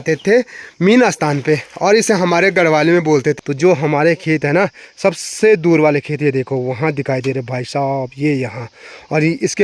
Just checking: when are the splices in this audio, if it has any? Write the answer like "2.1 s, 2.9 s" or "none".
3.3 s